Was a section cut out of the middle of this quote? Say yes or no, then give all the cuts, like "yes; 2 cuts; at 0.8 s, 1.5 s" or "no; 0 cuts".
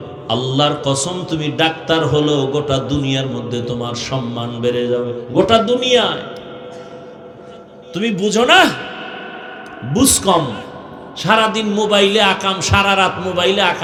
no; 0 cuts